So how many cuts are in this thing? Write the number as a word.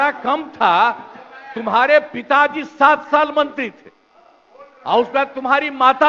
zero